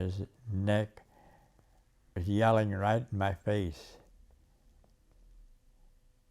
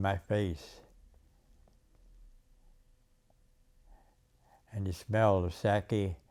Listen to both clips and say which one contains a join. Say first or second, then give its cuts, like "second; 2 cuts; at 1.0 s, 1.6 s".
first; 1 cut; at 2.2 s